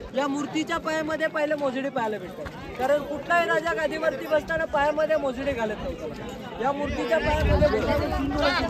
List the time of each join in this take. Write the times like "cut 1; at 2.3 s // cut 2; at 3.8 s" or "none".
none